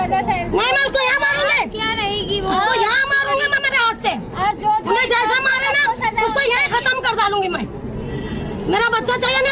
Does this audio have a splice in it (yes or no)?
no